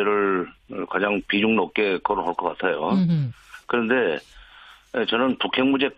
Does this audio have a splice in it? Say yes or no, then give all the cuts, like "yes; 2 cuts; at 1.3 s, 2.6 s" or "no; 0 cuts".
yes; 1 cut; at 2.6 s